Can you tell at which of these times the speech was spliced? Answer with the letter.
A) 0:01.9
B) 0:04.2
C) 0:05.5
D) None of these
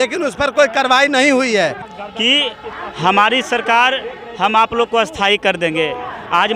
A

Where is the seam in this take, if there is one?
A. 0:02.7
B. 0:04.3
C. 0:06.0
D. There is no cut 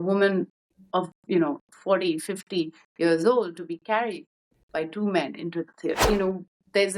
C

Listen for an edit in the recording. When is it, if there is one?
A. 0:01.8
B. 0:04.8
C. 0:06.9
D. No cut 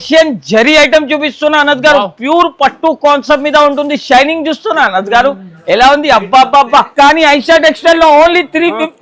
C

